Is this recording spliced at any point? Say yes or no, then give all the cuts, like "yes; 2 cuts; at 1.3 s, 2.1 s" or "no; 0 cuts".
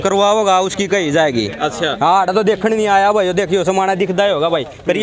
no; 0 cuts